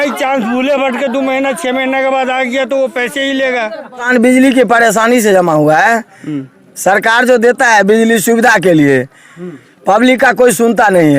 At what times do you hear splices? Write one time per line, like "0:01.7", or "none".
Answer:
0:04.1

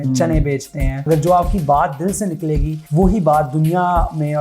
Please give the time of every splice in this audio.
0:01.1
0:02.8

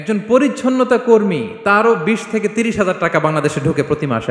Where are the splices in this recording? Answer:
none

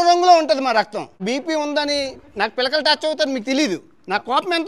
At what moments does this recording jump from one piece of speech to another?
0:01.2

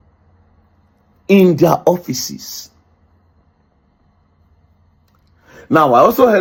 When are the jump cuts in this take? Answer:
none

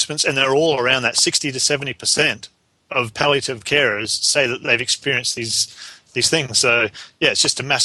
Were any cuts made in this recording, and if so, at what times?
none

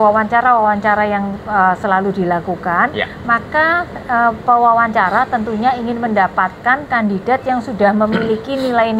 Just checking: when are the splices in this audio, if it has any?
none

